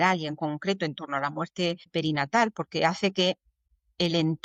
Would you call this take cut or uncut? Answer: uncut